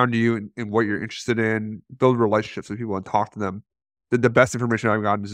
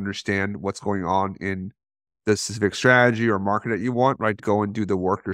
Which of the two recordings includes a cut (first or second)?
second